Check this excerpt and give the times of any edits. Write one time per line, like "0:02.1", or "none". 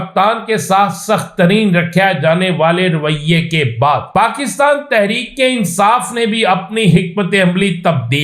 0:04.1